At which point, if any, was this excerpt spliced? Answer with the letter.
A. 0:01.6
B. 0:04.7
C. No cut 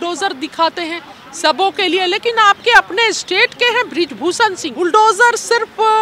B